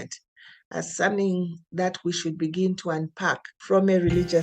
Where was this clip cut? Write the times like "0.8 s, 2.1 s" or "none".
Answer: 3.5 s